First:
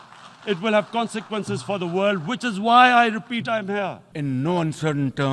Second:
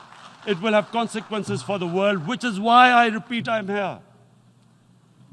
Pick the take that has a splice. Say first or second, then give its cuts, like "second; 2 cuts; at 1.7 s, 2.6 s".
first; 1 cut; at 4.1 s